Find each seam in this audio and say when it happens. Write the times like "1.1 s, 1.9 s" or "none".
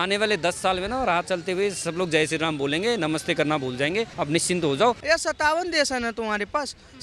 4.1 s, 5.0 s